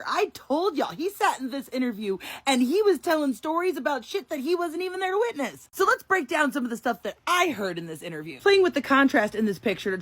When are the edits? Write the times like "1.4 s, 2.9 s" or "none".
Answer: 8.4 s